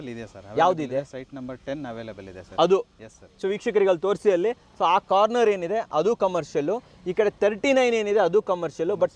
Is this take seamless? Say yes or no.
yes